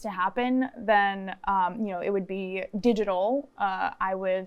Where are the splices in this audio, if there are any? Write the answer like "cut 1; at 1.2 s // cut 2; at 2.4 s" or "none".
none